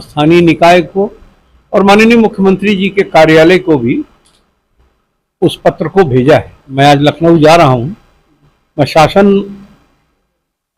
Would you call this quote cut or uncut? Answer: cut